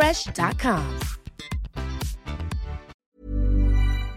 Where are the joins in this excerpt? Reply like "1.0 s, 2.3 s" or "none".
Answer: 3.0 s